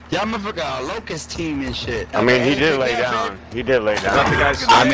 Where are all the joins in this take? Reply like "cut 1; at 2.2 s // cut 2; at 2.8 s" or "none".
cut 1; at 2.1 s